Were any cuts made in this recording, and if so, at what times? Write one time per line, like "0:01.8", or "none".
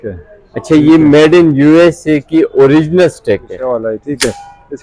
0:03.5